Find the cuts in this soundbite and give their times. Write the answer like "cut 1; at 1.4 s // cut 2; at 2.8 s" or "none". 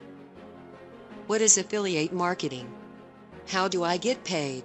cut 1; at 1.3 s